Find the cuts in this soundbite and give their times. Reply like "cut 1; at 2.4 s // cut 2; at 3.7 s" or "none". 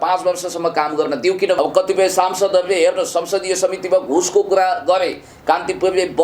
cut 1; at 1.6 s